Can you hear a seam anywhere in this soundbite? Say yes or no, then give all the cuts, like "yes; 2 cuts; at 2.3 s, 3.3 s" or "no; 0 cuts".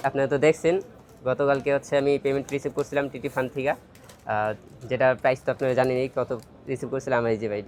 no; 0 cuts